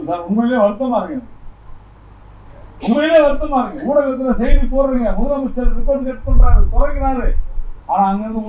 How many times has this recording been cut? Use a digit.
0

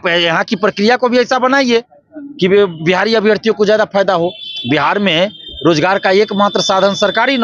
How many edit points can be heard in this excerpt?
0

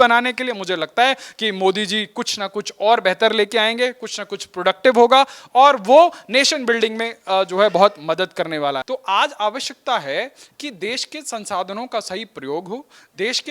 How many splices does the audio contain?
1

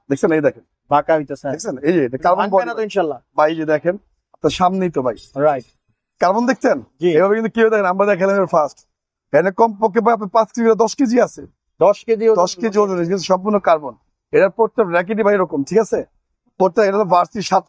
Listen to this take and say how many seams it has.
0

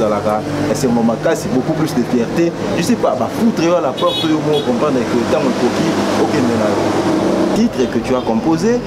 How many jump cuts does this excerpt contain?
1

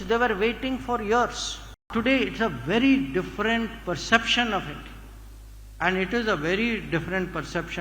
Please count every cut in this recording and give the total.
1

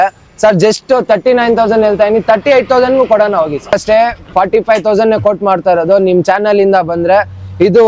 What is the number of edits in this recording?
1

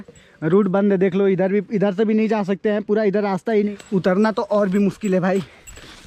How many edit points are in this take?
1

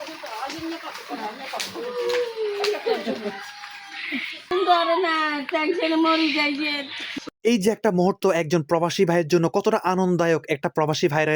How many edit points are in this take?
2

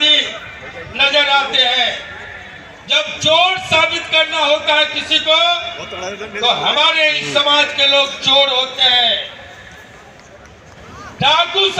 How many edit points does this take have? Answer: 0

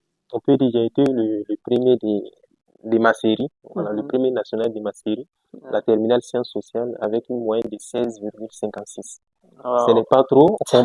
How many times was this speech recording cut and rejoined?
0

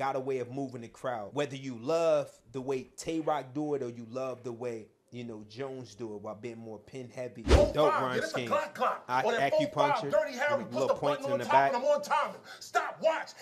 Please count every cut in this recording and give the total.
1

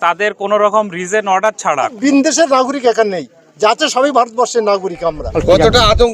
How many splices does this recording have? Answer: 2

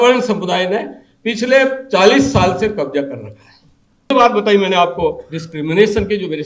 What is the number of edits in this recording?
1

